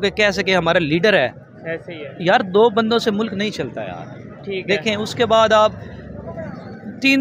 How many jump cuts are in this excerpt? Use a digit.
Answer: 0